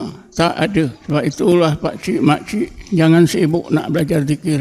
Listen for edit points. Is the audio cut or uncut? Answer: cut